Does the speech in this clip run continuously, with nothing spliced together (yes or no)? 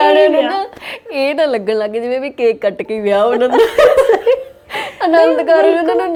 yes